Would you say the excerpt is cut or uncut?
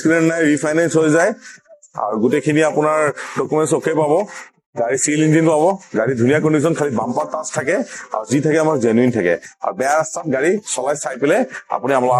uncut